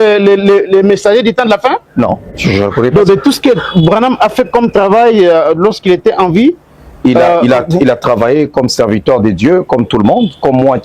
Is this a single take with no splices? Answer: no; 1 cut; at 2.3 s

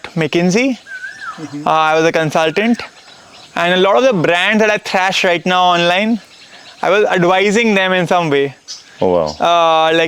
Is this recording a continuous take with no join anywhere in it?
yes; 0 cuts

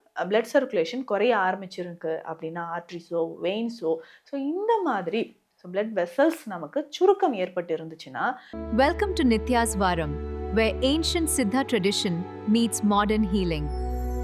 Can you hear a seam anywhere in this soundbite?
yes; 1 cut; at 8.5 s

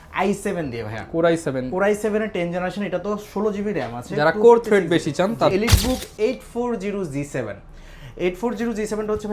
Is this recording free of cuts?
no; 1 cut; at 5.5 s

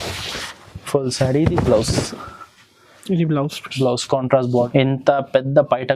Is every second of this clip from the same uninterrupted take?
no; 1 cut; at 4.7 s

